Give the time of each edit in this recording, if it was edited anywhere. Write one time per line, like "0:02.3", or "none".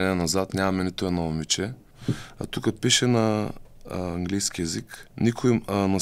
0:01.9
0:05.0